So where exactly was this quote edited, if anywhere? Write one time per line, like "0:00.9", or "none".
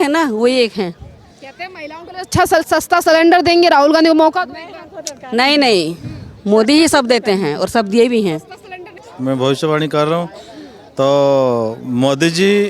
0:09.0